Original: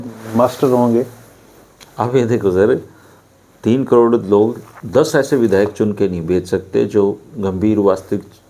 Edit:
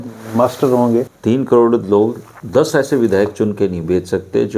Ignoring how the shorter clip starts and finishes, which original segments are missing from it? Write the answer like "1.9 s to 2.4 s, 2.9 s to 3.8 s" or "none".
1.1 s to 3.5 s